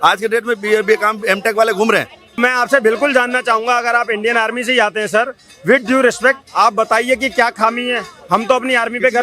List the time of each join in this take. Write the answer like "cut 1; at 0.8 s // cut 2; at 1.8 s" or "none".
cut 1; at 2.4 s